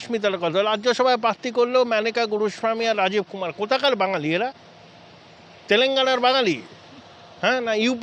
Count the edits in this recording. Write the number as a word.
zero